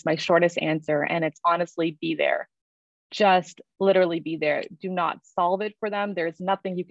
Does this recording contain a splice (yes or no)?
no